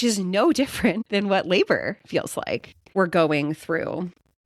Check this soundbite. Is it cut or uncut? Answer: cut